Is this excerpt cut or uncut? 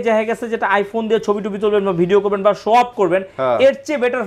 uncut